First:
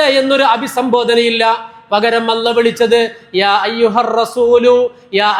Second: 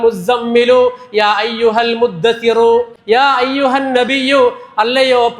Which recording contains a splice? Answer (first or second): second